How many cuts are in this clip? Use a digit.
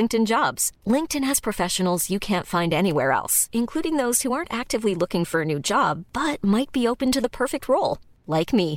0